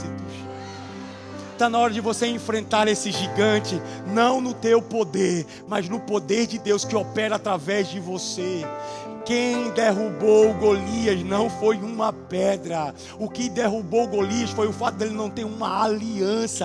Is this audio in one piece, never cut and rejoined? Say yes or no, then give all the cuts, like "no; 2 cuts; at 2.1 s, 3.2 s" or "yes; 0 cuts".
yes; 0 cuts